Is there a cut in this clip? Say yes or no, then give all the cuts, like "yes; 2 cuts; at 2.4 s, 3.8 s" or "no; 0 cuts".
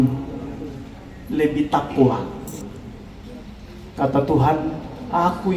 no; 0 cuts